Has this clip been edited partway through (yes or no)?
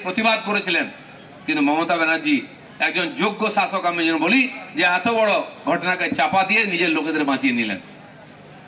no